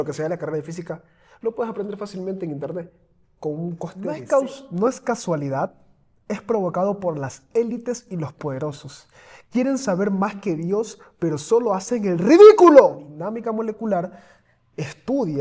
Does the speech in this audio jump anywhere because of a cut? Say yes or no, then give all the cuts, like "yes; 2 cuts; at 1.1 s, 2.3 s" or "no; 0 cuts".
yes; 2 cuts; at 4.2 s, 13.1 s